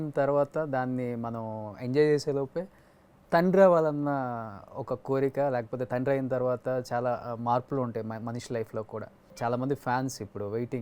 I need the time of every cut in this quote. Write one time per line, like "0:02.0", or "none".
0:09.2